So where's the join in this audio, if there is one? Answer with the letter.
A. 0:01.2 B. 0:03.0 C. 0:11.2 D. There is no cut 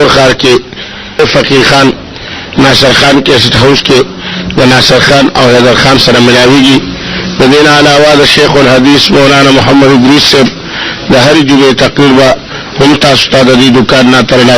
A